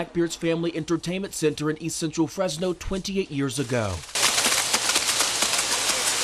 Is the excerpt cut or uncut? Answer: uncut